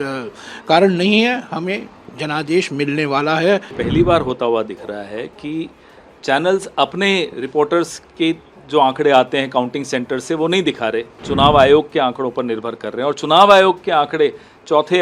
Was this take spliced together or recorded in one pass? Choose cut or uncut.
cut